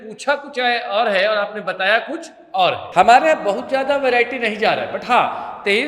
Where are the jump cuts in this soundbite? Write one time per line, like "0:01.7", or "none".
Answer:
0:02.8